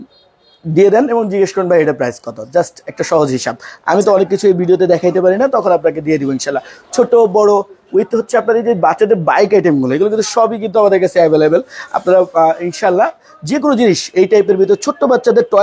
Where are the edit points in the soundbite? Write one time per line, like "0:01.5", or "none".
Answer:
none